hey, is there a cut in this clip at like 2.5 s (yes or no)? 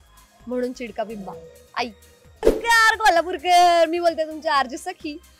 yes